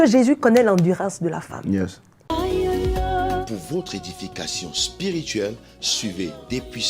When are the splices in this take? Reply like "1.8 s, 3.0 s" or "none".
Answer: 2.1 s